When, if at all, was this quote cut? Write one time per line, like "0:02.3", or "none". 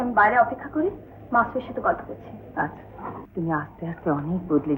0:03.2